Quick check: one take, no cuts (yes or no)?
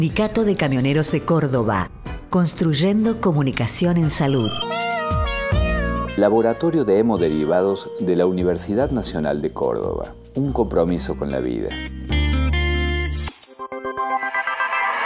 no